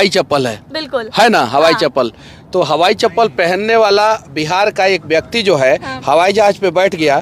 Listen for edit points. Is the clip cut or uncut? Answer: uncut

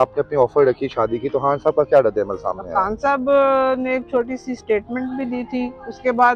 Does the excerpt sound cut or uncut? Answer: uncut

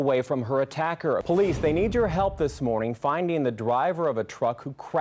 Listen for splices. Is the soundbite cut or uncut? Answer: cut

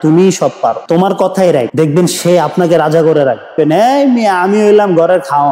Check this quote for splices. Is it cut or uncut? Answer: cut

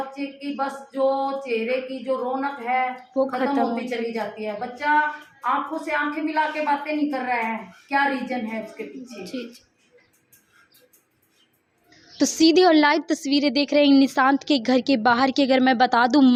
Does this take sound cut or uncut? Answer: uncut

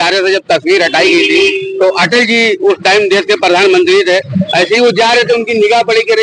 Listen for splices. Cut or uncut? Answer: uncut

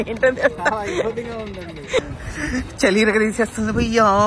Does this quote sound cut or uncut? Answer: cut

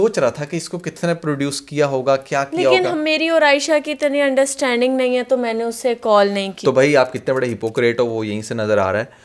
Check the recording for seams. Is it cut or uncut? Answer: uncut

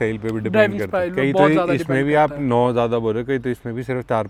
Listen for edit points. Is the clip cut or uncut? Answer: uncut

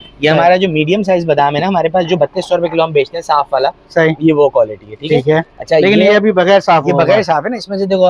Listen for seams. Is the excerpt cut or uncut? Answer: uncut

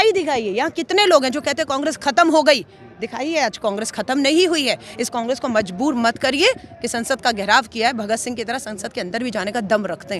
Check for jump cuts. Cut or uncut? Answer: uncut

